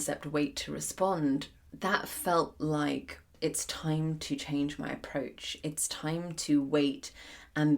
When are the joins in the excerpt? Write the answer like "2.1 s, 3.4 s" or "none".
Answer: 1.6 s, 3.3 s